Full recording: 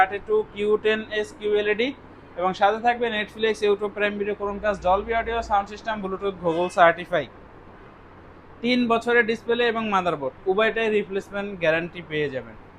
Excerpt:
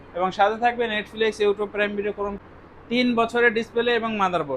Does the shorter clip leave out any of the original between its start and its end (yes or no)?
yes